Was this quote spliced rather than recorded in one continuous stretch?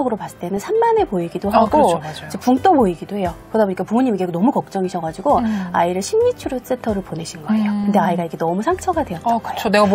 no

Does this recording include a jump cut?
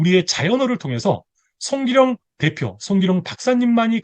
no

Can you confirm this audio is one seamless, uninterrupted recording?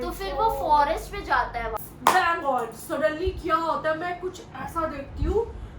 no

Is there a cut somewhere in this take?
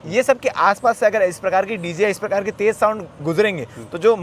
no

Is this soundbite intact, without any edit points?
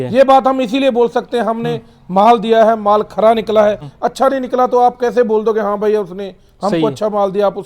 no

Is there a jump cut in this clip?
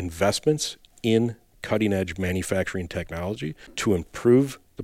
yes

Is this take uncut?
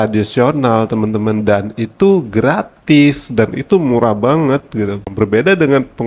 no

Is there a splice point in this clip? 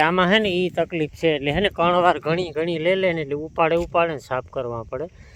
no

